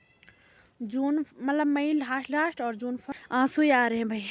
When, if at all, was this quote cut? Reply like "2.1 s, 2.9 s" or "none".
3.4 s